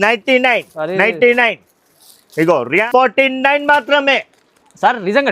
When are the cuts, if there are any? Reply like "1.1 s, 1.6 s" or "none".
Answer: 2.9 s